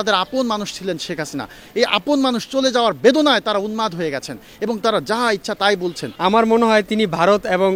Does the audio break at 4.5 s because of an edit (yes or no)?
no